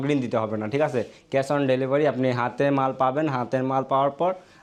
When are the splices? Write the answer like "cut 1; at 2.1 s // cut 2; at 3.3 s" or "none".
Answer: none